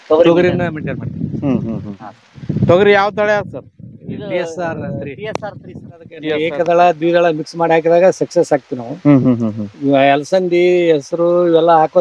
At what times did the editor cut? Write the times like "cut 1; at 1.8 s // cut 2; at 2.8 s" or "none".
cut 1; at 6.4 s